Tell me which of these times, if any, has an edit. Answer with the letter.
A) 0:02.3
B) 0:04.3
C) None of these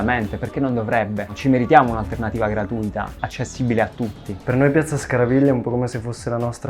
B